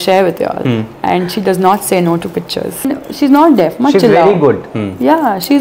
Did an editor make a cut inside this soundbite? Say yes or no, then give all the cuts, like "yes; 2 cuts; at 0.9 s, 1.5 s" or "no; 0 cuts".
yes; 1 cut; at 2.9 s